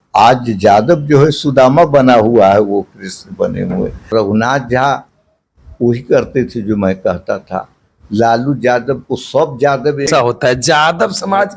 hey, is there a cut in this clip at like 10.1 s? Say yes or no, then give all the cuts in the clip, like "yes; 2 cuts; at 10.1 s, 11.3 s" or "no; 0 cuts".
yes; 2 cuts; at 4.1 s, 10.1 s